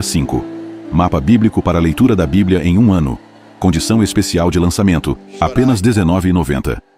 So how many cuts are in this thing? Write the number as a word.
zero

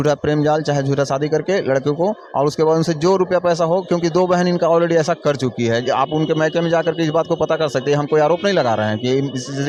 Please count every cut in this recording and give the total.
zero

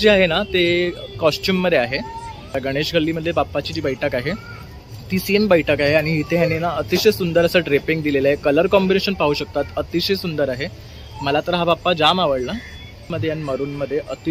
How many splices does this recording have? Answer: two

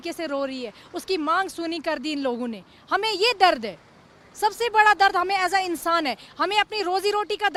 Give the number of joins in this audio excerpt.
zero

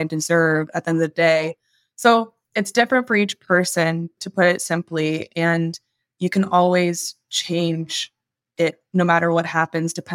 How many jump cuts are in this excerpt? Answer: one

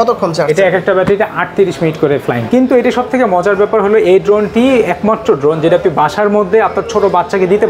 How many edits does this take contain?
one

